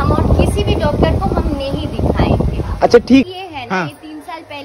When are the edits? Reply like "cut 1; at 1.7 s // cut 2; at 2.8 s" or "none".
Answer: cut 1; at 3.2 s